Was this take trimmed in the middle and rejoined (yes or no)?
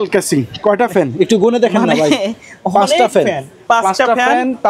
no